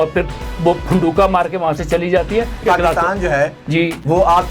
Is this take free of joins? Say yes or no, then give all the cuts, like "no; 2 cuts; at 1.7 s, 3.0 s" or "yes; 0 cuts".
no; 1 cut; at 2.6 s